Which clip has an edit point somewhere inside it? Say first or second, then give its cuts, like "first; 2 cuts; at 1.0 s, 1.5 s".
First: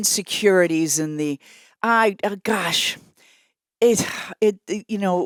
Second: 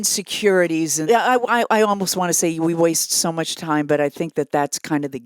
second; 1 cut; at 1.0 s